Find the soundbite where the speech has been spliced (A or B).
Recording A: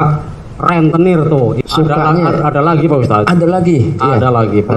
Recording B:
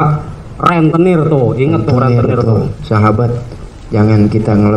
A